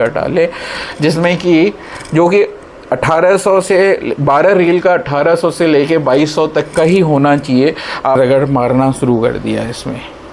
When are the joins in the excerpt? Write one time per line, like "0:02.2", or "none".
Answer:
0:08.2